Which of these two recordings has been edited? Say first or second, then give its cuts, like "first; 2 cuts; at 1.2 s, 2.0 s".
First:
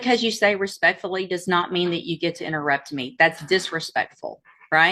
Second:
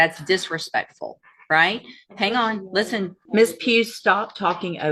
second; 1 cut; at 3.2 s